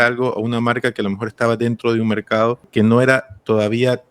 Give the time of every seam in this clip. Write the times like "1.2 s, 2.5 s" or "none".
2.7 s